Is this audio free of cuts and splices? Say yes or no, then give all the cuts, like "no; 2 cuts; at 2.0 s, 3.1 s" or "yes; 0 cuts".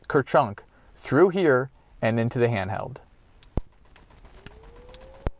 yes; 0 cuts